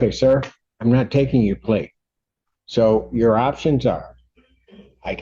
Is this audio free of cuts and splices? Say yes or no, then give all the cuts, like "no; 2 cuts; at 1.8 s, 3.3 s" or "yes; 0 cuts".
yes; 0 cuts